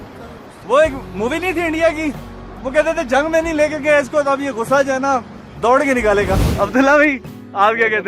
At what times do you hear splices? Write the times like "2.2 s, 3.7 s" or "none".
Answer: 6.5 s